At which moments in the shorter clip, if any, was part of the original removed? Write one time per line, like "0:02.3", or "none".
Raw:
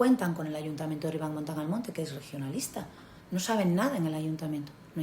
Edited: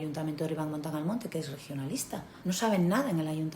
0:02.3